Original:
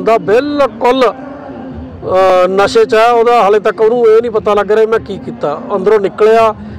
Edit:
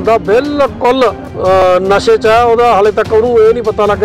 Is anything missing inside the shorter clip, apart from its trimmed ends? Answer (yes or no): yes